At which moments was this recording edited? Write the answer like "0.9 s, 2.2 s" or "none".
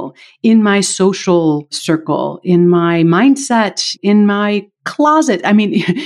1.7 s, 3.9 s